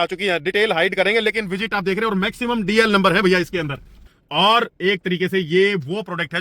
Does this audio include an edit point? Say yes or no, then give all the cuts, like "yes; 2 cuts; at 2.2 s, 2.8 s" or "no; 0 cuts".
yes; 1 cut; at 4.1 s